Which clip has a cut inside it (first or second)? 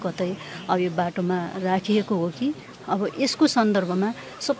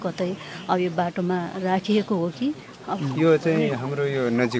second